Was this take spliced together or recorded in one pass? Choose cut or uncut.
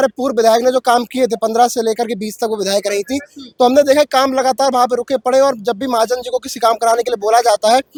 uncut